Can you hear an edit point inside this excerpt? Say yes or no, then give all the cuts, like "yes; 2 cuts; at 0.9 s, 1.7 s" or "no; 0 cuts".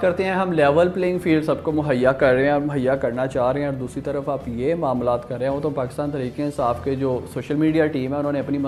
no; 0 cuts